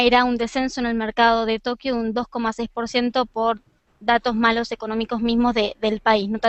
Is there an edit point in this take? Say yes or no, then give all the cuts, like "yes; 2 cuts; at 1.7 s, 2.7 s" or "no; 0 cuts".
no; 0 cuts